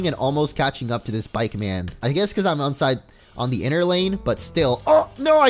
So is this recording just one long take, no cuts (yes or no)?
yes